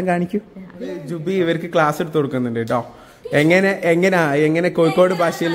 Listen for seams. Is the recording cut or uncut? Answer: cut